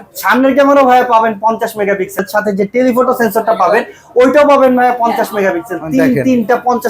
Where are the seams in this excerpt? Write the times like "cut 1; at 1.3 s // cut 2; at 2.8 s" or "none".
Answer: cut 1; at 2.2 s